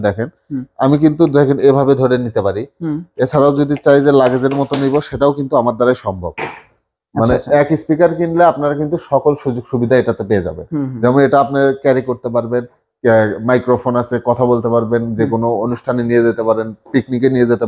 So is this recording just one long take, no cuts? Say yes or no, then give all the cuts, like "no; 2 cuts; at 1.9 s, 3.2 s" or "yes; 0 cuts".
yes; 0 cuts